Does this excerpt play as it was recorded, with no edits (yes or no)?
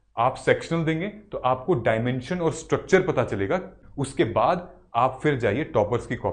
no